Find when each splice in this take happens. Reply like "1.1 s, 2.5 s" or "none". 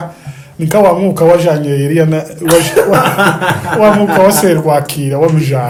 none